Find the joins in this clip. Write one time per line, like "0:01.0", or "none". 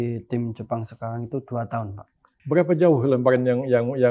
0:02.3